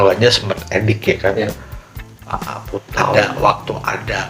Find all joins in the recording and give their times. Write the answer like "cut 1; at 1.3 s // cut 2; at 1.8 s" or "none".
cut 1; at 3.1 s